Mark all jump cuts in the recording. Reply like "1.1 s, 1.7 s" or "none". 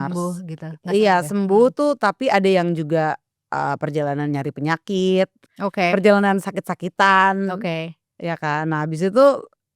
5.4 s